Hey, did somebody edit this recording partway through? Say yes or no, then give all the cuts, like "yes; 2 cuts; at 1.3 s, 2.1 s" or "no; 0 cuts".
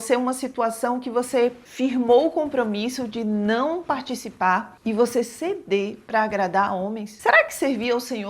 yes; 1 cut; at 7.1 s